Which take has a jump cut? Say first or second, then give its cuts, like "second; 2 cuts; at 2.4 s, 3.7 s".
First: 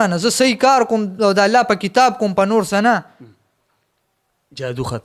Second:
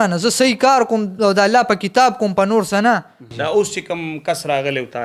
second; 1 cut; at 3.3 s